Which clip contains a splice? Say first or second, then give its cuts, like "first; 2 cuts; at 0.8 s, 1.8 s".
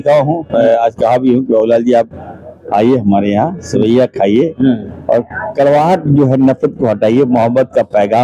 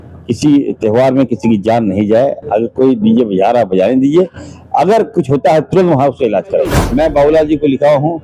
second; 1 cut; at 6.8 s